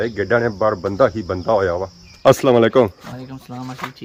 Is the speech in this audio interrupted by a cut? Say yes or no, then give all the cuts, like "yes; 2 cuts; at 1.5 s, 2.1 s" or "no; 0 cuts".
no; 0 cuts